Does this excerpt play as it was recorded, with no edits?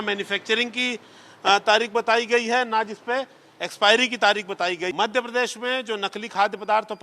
no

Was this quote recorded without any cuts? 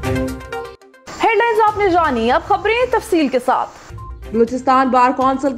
yes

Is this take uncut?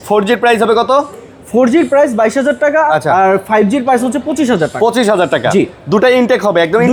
yes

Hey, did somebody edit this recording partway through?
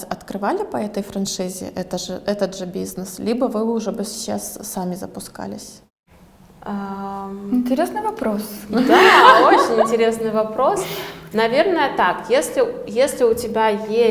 no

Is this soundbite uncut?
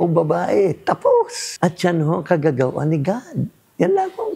no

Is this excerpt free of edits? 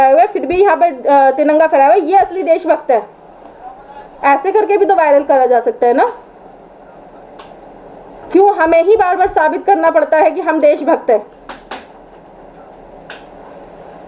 yes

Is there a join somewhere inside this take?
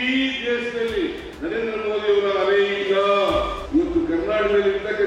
yes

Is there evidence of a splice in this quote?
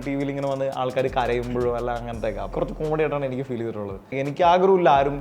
yes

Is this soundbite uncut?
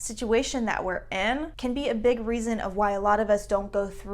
no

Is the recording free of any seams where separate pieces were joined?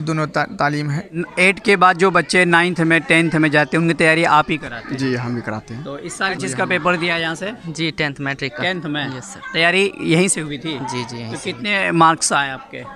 no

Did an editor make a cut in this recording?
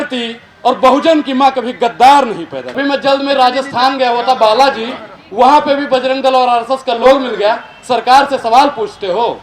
yes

